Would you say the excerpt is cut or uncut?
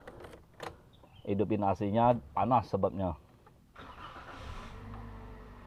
uncut